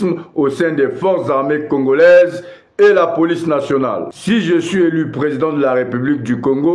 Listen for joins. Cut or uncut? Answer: cut